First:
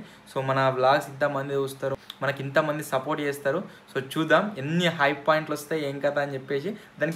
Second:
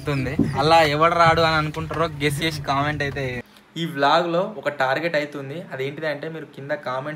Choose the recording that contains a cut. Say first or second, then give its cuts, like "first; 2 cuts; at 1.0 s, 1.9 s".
second; 1 cut; at 3.4 s